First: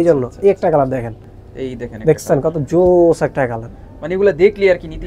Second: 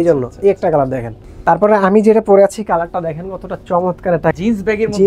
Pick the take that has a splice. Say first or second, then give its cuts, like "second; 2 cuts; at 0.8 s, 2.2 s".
second; 2 cuts; at 1.3 s, 4.3 s